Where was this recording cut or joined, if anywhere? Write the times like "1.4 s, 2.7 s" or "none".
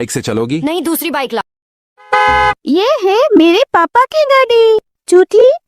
1.4 s